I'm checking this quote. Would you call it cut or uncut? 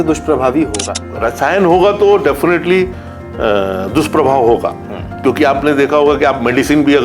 cut